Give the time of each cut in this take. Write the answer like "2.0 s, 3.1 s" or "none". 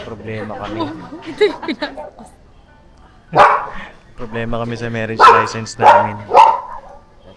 none